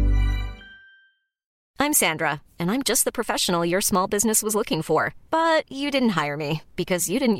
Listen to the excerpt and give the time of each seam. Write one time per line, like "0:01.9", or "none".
0:01.6